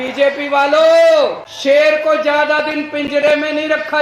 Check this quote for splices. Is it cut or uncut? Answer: cut